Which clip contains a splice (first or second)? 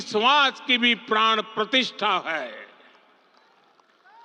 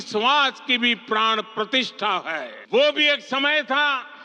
second